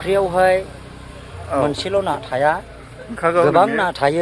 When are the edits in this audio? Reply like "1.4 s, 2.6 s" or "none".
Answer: none

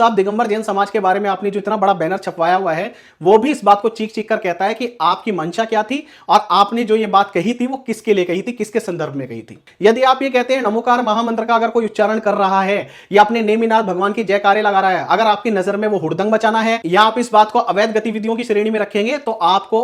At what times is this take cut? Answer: none

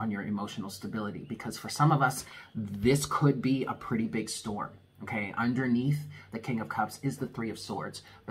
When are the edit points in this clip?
none

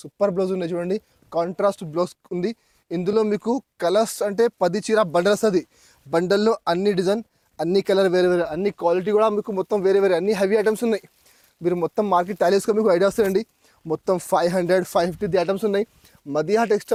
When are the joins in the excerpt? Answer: none

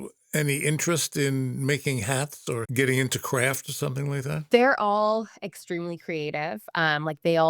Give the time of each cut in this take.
2.6 s, 4.5 s

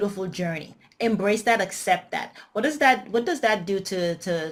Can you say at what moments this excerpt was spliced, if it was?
none

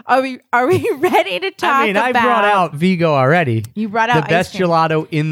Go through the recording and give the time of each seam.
2.8 s

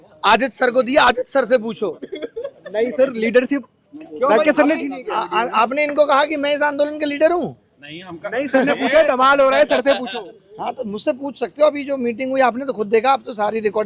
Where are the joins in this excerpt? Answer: none

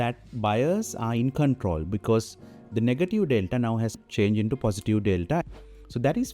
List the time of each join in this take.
5.4 s

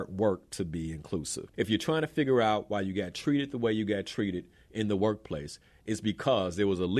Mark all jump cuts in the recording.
1.4 s

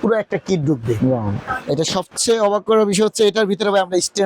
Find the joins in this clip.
1.4 s

